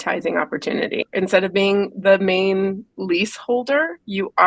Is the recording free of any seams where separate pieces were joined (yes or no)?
no